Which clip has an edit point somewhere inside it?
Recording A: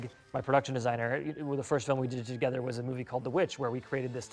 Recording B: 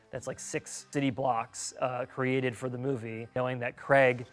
B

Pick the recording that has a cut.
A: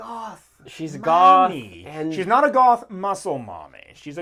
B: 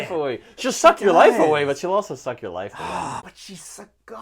B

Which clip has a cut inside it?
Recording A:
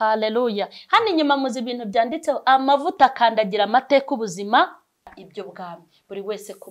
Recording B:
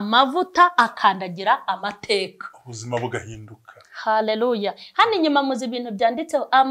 A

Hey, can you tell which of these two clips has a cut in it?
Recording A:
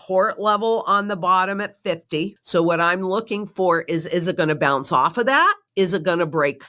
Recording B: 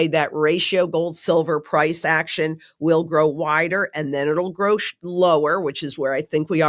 A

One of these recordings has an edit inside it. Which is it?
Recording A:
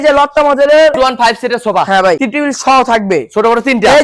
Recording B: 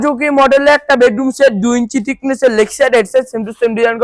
A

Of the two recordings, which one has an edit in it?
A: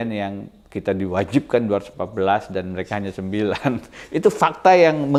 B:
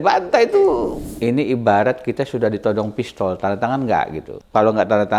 B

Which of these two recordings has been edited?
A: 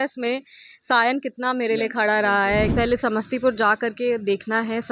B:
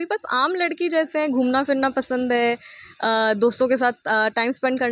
A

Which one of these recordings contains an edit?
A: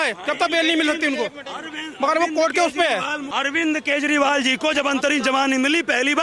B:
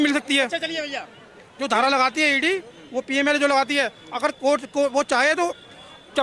A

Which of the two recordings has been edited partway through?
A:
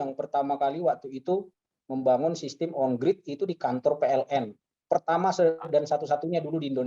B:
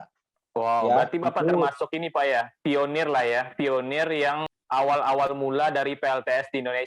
B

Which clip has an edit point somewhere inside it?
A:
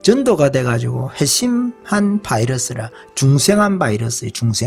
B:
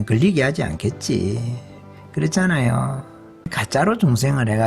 B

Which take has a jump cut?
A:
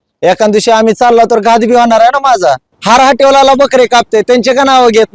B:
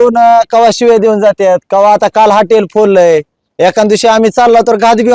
A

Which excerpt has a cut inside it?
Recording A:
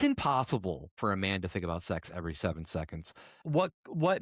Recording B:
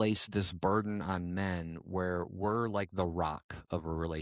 A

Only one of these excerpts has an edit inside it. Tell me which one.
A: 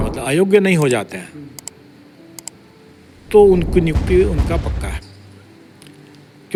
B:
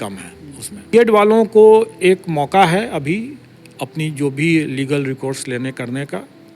B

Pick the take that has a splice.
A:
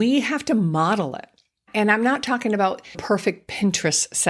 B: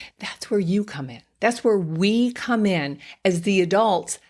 A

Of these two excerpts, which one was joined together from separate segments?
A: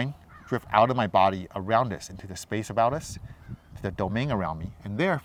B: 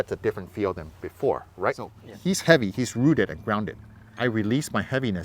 B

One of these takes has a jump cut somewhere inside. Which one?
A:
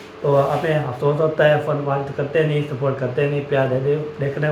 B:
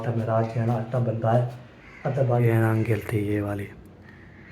B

